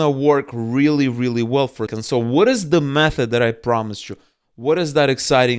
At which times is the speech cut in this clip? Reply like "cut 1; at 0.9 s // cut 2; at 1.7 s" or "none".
cut 1; at 2.0 s